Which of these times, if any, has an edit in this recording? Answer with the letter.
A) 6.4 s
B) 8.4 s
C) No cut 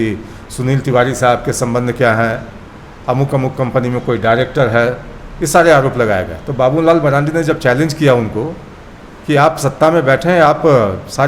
C